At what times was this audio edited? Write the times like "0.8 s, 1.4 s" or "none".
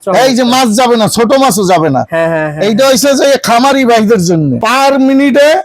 4.6 s